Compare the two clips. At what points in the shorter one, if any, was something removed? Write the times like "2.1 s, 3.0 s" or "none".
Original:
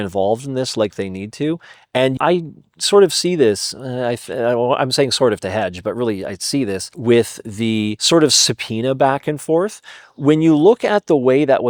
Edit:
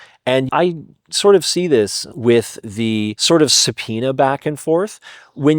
2.1 s